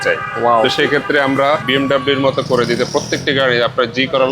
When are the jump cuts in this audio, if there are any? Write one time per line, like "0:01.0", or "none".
0:01.6